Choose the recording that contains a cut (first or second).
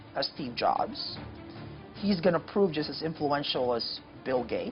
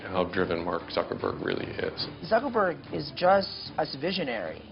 second